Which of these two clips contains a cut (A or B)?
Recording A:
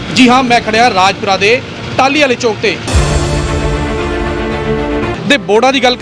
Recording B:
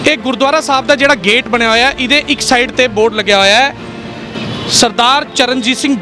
A